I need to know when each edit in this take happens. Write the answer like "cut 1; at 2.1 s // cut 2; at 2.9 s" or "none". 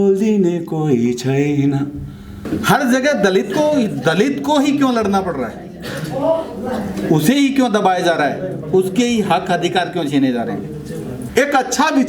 cut 1; at 2.4 s // cut 2; at 11.2 s